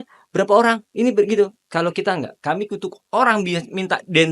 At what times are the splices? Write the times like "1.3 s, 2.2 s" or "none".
2.9 s